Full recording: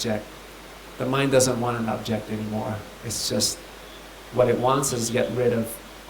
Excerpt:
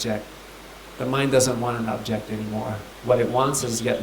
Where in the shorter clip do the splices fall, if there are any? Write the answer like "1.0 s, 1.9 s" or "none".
2.9 s